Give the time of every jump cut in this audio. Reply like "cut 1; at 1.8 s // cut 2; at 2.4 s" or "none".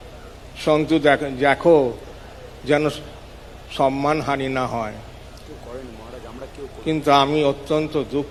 none